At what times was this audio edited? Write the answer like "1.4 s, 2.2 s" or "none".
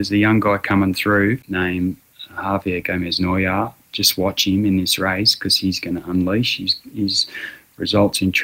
1.4 s